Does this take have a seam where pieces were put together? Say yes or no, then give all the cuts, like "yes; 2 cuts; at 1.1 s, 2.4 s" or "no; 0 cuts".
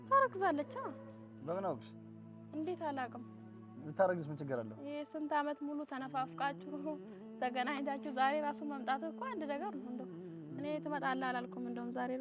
no; 0 cuts